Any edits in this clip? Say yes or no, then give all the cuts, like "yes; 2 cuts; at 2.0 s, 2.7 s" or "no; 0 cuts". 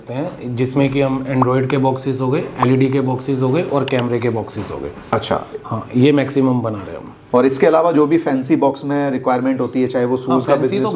no; 0 cuts